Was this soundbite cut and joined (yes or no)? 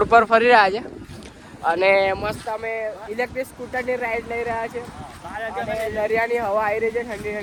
no